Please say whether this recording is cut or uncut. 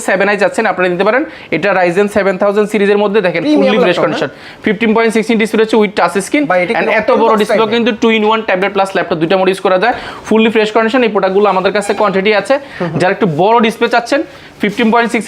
uncut